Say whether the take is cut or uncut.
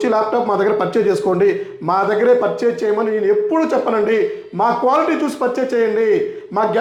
uncut